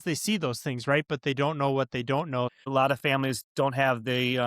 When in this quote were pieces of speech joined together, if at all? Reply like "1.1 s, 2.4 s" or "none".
2.7 s